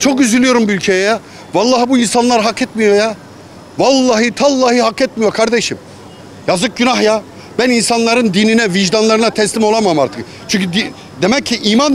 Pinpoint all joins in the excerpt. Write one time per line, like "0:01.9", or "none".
none